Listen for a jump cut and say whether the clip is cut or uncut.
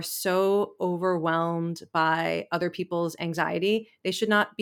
uncut